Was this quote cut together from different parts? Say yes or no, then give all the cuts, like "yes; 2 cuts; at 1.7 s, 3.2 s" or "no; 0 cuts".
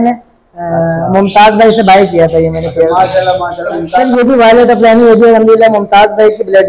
yes; 1 cut; at 4.0 s